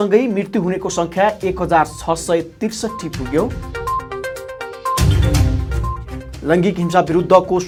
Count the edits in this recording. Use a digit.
0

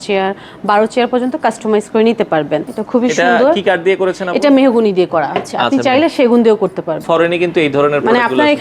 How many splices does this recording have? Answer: 2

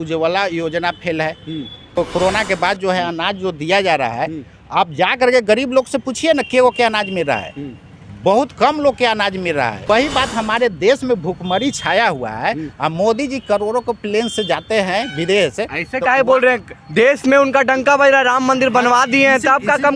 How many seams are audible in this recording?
2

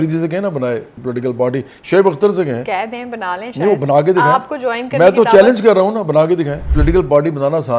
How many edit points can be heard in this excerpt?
2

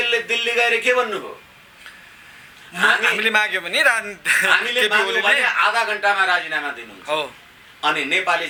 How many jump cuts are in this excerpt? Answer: 0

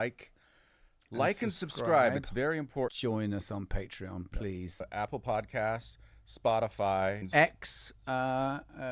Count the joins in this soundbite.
1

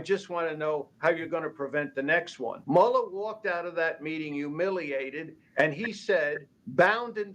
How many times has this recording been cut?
1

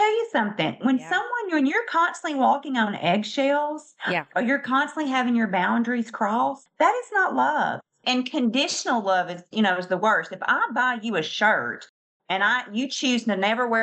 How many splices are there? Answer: 0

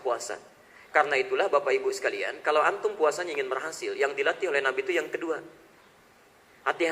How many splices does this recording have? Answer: 0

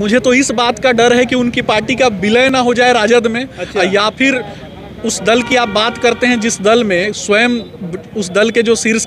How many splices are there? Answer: 0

